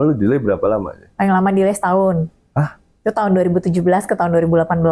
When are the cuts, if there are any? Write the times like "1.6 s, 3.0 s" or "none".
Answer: none